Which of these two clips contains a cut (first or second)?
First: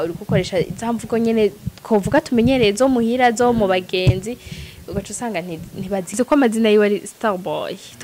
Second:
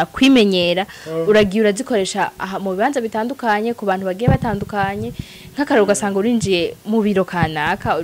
first